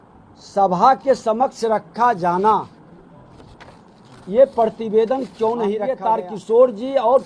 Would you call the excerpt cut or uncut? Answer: cut